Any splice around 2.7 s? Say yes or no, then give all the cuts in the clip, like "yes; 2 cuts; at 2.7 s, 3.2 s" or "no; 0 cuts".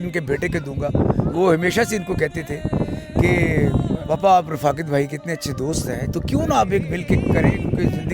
no; 2 cuts; at 4.0 s, 6.1 s